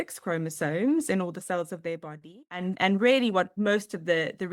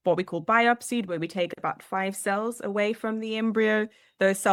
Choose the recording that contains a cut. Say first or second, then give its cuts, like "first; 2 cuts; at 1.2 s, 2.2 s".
first; 2 cuts; at 2.7 s, 3.5 s